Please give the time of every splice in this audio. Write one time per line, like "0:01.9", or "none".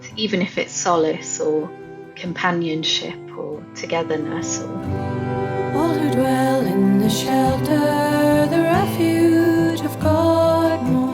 0:04.4

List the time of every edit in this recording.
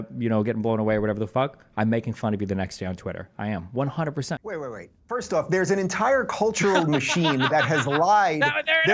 0:04.4

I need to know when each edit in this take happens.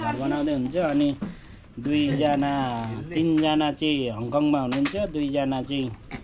none

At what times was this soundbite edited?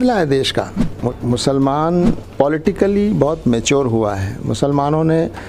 0:01.1
0:02.2

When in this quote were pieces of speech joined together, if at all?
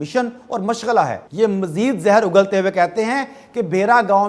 0:01.2

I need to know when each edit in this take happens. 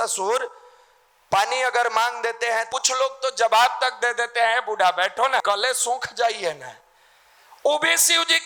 0:02.7
0:05.4

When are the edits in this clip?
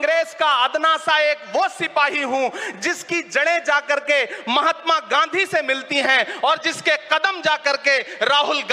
none

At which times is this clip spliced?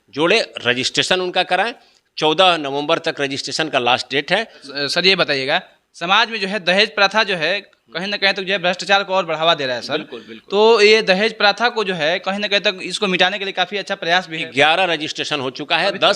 0:04.6
0:14.4

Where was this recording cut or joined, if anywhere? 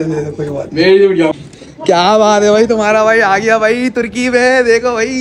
0:01.3

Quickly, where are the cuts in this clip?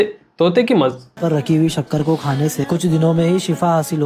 0:01.2

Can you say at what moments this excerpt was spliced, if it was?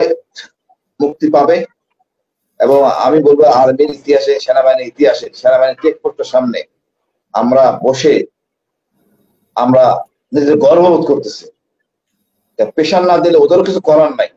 none

